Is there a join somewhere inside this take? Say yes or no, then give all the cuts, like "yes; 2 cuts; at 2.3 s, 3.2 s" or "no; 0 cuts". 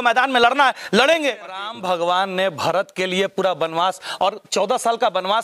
yes; 1 cut; at 1.7 s